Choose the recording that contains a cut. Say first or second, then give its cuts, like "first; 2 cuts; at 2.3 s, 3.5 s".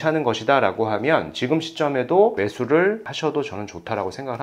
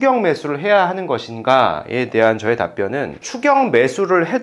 first; 1 cut; at 3.1 s